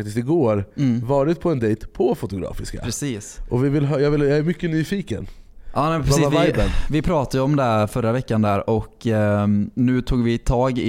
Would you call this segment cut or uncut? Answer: uncut